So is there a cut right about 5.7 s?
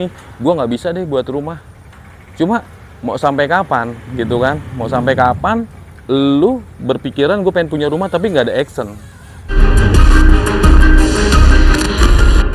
no; 1 cut; at 9.5 s

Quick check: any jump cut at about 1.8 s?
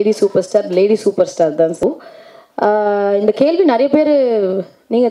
yes; 1 cut; at 1.8 s

